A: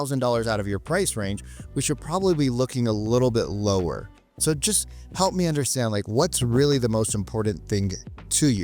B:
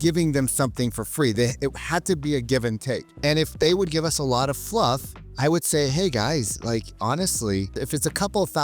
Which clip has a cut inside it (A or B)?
B